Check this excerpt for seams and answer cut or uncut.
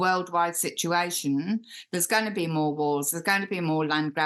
uncut